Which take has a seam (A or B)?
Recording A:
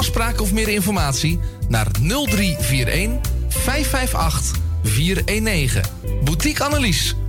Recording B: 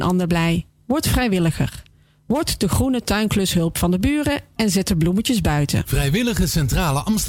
B